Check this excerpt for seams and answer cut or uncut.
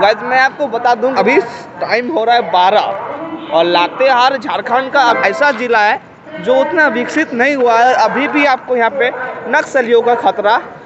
cut